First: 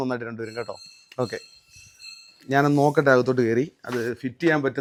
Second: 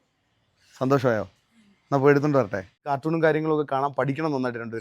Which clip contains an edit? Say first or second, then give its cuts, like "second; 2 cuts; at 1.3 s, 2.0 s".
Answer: second; 1 cut; at 3.0 s